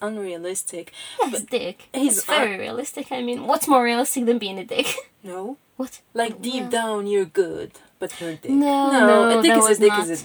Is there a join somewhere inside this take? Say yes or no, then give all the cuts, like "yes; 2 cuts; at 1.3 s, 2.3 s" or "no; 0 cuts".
yes; 1 cut; at 1.8 s